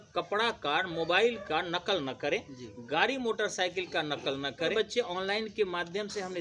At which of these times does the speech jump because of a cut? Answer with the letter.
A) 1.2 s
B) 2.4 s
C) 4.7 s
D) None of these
C